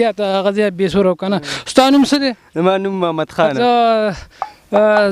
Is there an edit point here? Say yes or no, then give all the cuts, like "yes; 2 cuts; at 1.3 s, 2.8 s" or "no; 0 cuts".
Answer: yes; 1 cut; at 3.5 s